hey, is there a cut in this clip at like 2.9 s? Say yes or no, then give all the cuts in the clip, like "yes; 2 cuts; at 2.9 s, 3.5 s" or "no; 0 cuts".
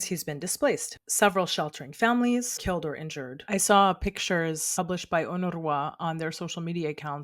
yes; 3 cuts; at 1.0 s, 2.9 s, 4.7 s